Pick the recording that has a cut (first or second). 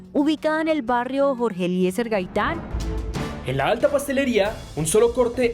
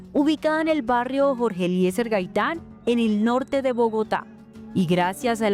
first